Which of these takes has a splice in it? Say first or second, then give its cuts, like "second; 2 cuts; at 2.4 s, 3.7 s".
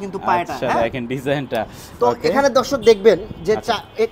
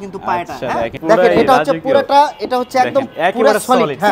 second; 1 cut; at 0.9 s